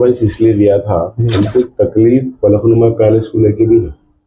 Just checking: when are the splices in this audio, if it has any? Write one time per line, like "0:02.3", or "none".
0:01.2